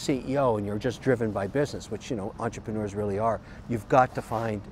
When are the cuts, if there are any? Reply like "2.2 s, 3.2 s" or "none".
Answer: none